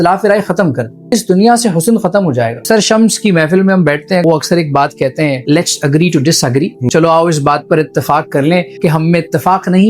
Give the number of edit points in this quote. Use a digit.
6